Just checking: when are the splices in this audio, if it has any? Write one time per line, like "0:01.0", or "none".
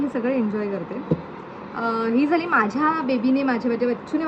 none